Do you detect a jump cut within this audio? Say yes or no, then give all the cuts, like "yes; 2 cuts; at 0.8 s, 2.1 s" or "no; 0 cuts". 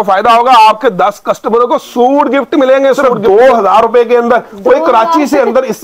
yes; 1 cut; at 3.1 s